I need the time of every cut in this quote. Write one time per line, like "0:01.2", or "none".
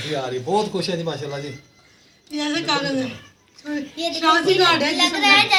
none